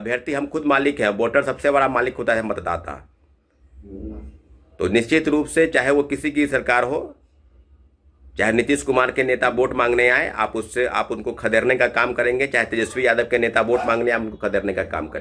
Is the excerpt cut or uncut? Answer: uncut